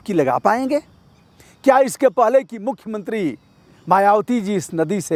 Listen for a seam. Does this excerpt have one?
no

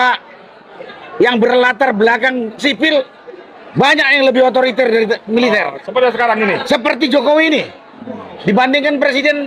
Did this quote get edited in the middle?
no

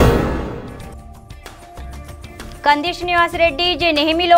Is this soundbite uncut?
yes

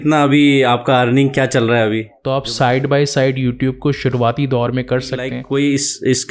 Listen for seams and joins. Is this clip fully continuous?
no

